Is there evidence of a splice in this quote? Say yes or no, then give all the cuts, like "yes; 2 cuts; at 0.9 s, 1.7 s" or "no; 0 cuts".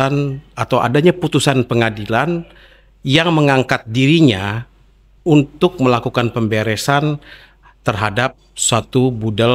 no; 0 cuts